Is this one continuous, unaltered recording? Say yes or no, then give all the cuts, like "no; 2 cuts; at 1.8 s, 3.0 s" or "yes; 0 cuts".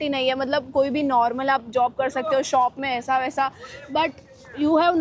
yes; 0 cuts